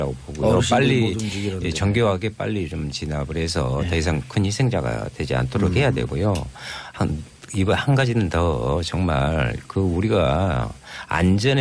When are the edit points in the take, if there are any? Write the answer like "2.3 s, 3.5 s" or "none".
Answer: 4.8 s

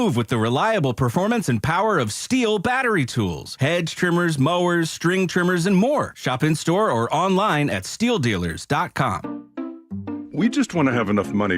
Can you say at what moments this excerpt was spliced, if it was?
9.2 s

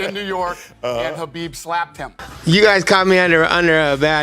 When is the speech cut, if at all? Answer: 2.3 s

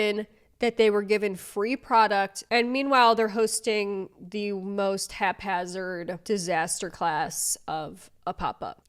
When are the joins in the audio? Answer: 2.5 s, 6.2 s

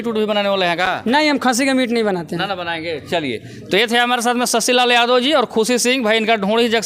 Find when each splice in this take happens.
none

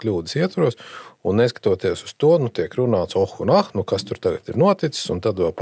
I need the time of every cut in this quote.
none

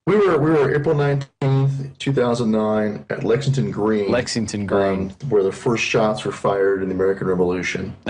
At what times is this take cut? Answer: none

